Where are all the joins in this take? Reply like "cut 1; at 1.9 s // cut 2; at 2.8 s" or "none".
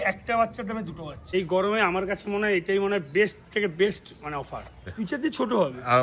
cut 1; at 1.3 s // cut 2; at 4.8 s